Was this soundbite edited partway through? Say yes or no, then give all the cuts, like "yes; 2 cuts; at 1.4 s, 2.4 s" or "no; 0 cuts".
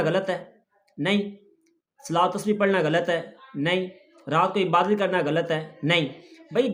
no; 0 cuts